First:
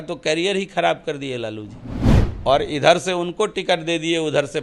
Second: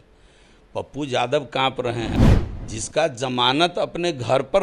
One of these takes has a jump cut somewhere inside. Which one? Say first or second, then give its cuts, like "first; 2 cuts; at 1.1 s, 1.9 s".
second; 1 cut; at 2.2 s